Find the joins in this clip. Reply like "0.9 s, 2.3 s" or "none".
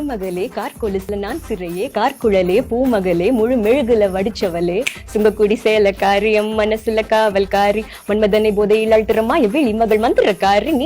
1.1 s